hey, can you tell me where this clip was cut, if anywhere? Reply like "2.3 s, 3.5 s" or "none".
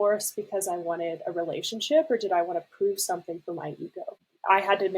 4.1 s